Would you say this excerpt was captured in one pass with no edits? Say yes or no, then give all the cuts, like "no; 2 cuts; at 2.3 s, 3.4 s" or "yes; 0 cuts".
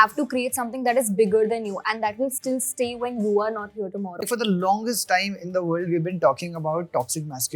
no; 1 cut; at 4.2 s